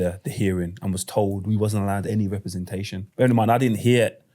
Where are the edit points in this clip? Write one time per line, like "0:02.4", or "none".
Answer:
0:03.0